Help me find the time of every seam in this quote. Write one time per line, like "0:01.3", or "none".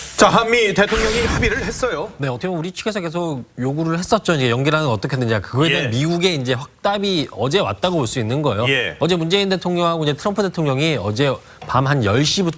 0:10.2